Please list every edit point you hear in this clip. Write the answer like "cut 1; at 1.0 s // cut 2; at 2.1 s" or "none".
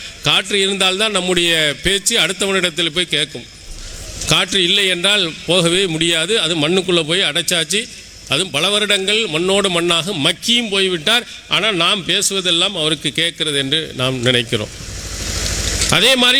none